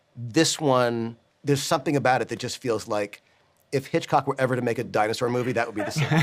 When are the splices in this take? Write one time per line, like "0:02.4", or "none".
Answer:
none

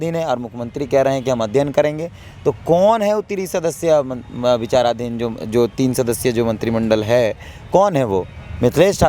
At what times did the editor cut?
none

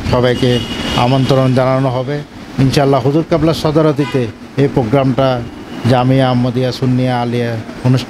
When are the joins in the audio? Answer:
none

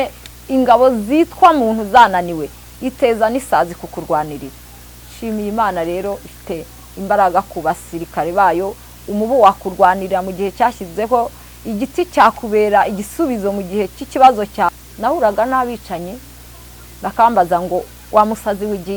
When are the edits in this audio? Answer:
0:14.7

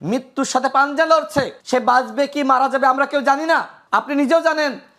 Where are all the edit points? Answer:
0:01.6
0:03.8

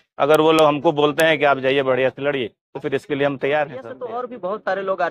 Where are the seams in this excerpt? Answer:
0:03.9

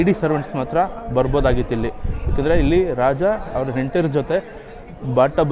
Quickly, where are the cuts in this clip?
none

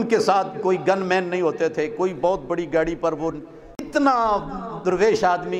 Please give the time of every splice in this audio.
0:03.9

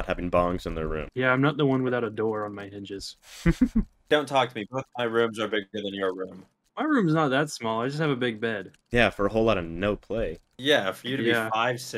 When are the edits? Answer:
0:04.0

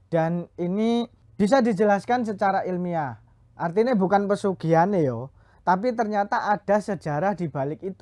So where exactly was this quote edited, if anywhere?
0:01.2

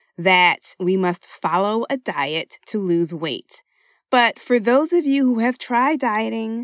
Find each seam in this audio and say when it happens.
none

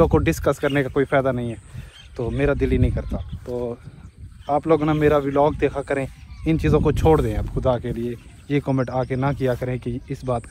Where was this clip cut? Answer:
none

